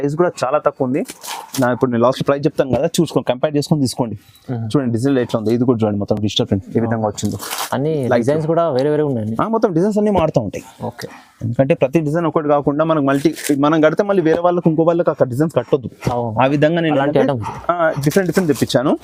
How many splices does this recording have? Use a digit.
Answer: 0